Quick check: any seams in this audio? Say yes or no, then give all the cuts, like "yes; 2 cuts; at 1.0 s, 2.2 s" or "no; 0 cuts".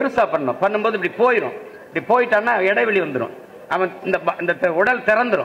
no; 0 cuts